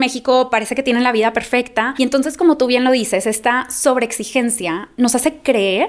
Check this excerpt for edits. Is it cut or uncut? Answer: uncut